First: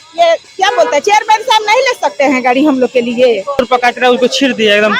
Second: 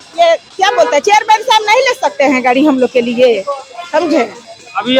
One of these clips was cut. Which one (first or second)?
first